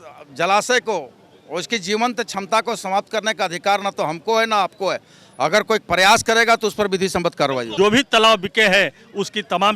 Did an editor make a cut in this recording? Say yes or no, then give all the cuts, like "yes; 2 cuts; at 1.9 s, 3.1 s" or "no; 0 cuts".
yes; 1 cut; at 7.6 s